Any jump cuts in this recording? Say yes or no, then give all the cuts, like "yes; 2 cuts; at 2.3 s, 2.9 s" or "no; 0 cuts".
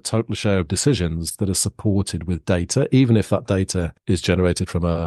yes; 1 cut; at 4.0 s